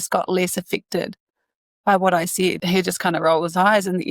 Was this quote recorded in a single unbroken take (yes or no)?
no